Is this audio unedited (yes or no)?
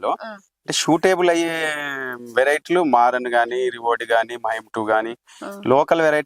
yes